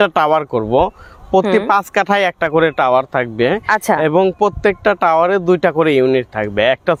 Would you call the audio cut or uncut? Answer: uncut